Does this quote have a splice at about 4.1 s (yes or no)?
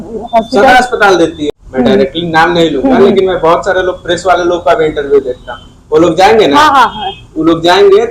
no